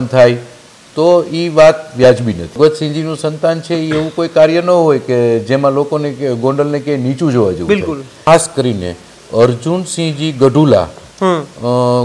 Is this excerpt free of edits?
no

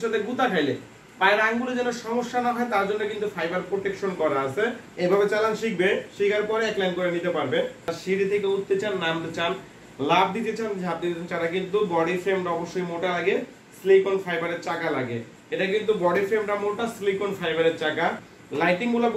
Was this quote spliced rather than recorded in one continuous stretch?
yes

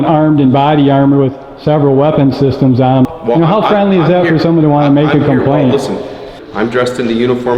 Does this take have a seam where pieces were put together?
yes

